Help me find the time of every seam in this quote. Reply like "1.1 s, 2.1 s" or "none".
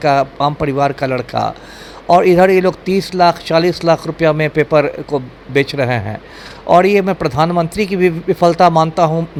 none